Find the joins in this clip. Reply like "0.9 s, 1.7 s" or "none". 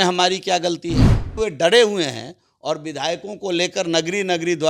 1.3 s